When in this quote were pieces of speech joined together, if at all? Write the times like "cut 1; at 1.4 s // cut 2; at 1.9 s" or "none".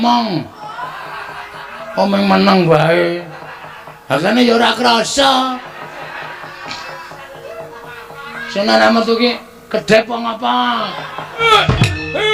cut 1; at 11.4 s